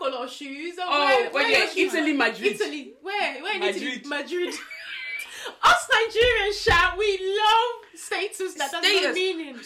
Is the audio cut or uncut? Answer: uncut